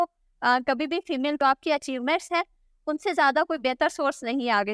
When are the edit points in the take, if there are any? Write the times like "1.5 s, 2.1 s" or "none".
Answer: 1.4 s